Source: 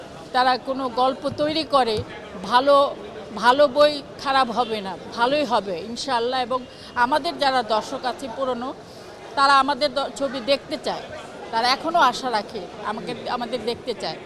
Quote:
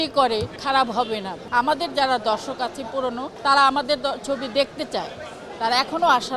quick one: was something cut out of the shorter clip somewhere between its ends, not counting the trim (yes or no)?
yes